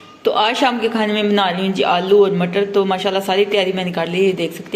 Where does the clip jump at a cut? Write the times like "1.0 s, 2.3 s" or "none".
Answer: none